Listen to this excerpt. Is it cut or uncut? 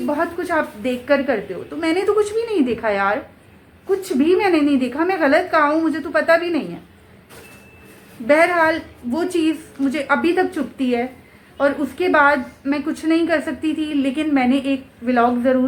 uncut